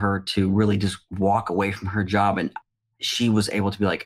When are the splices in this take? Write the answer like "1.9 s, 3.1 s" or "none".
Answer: 2.6 s

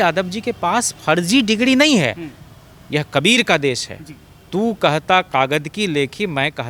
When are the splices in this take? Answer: none

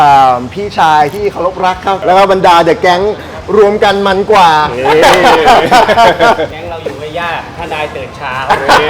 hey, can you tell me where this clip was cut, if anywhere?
1.9 s, 6.5 s

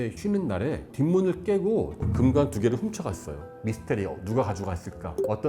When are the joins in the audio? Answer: 2.0 s, 3.5 s

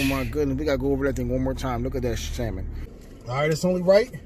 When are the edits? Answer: 2.8 s

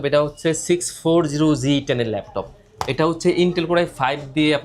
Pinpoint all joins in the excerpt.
none

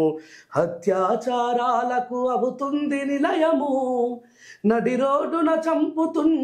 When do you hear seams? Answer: none

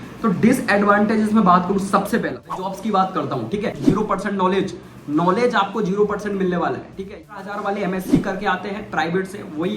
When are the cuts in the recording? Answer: 2.7 s, 3.8 s, 7.2 s

